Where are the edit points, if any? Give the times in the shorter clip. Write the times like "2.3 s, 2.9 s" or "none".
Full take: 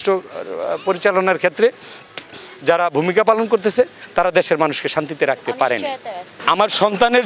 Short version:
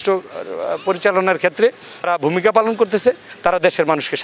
2.1 s